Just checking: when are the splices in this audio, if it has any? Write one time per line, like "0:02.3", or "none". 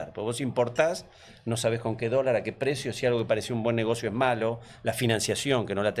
none